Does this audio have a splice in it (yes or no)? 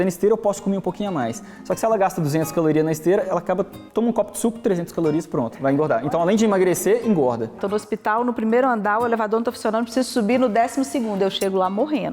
yes